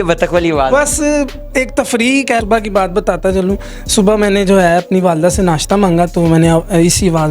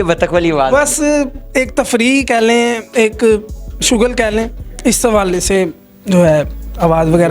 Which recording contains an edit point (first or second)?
first